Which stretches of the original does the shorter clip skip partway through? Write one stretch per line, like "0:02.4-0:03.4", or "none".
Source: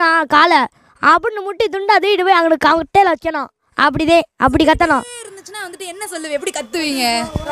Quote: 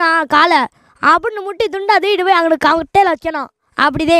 none

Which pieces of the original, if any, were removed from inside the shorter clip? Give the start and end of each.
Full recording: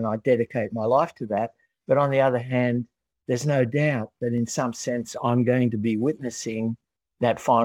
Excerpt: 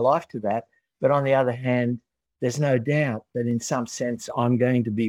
none

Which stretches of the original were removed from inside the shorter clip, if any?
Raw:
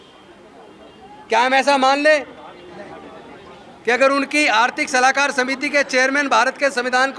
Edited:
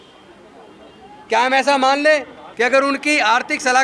0:02.4-0:03.7

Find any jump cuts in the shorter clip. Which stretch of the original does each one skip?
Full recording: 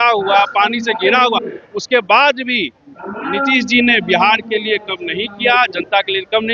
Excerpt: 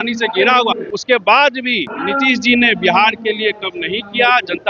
0:01.6-0:01.7
0:02.7-0:03.1

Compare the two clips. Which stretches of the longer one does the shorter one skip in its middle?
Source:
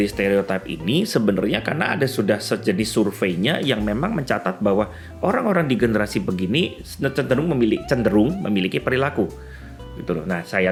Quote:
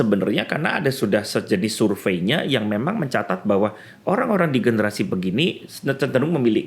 none

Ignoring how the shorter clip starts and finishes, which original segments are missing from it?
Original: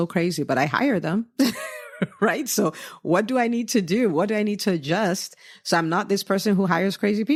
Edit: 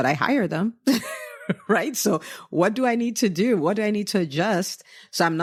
none

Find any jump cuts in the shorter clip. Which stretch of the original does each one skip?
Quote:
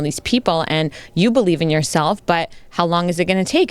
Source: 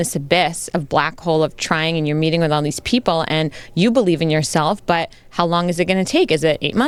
none

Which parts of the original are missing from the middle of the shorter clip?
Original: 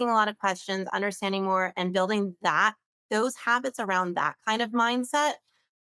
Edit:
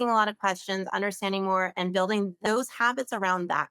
0:02.4-0:03.0

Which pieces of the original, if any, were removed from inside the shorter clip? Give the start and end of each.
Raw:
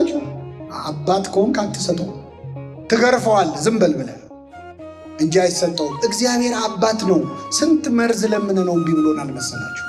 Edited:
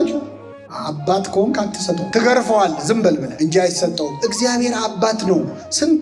0:02.1-0:02.8
0:04.1-0:05.1

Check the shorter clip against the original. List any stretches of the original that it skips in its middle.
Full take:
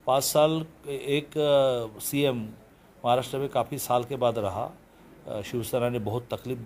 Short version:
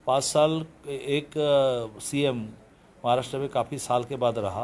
none

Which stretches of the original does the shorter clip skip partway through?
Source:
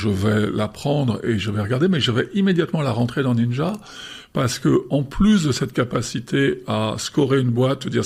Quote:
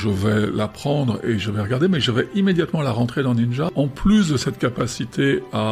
0:03.7-0:04.9

